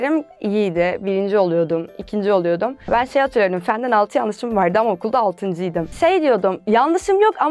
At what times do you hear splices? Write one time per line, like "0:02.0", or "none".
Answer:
0:02.9
0:05.8